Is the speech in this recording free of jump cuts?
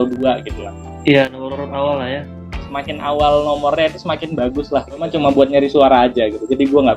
no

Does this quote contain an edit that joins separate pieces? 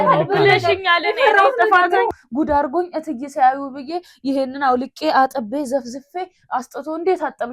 yes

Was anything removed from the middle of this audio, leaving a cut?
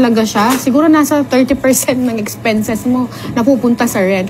no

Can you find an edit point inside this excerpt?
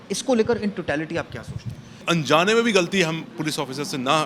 yes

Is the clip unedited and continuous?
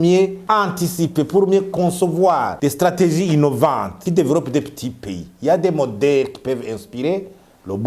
yes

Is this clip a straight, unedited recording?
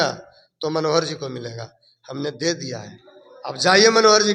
yes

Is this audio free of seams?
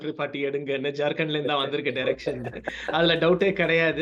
yes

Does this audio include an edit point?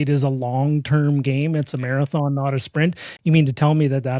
no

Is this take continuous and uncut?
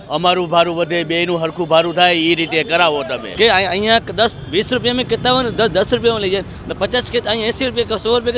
no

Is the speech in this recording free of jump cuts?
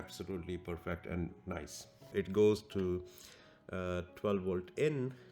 no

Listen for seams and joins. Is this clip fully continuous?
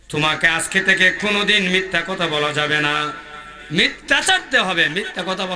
yes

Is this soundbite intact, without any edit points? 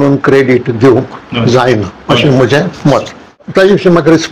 no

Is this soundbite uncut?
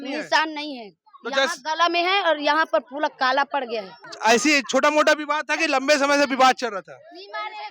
no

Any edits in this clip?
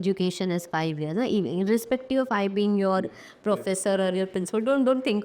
no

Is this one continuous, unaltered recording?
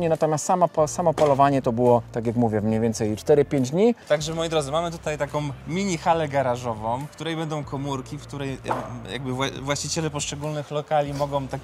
no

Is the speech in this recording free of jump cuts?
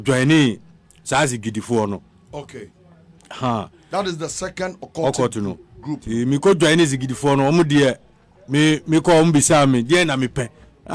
yes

